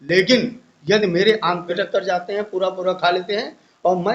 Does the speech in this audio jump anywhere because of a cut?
yes; 1 cut; at 1.8 s

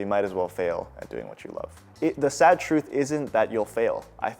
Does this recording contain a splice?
yes; 1 cut; at 1.7 s

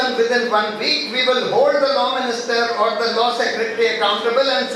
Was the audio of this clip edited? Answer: no; 0 cuts

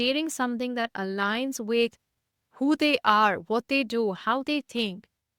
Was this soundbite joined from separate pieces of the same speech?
no; 0 cuts

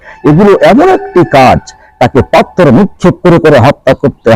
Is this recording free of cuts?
yes; 0 cuts

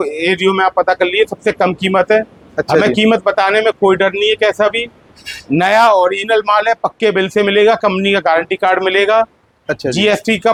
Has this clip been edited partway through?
no; 0 cuts

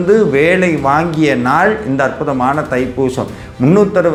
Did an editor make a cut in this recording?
no; 0 cuts

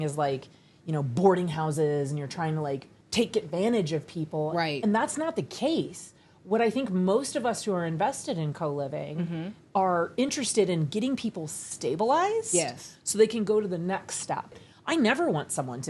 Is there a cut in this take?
yes; 2 cuts; at 3.0 s, 14.6 s

